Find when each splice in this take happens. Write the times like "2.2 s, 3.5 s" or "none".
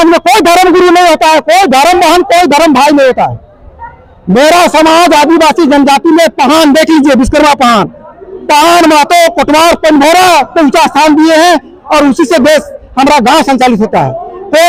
none